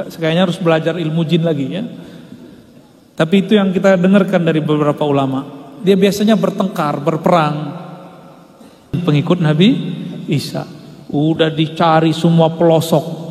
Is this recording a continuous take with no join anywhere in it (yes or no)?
no